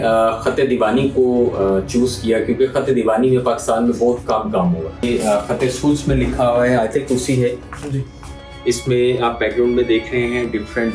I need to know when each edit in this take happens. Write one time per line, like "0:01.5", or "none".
0:05.0